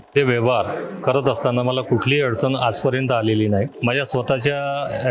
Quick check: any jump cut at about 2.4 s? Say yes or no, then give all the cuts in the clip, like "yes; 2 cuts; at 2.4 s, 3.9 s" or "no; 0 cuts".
no; 1 cut; at 3.7 s